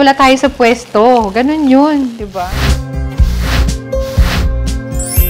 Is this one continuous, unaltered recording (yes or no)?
no